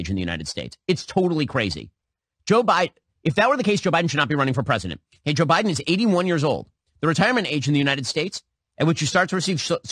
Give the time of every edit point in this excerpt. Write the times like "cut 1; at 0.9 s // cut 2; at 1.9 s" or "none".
none